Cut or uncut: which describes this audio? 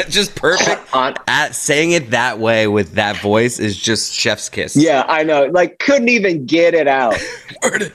uncut